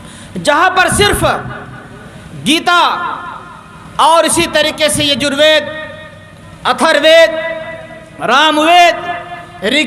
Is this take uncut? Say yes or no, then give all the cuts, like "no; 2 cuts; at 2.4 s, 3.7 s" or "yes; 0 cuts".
yes; 0 cuts